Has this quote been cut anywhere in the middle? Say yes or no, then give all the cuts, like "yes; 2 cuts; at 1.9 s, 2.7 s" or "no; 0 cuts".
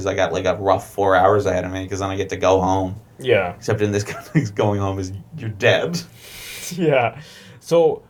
no; 0 cuts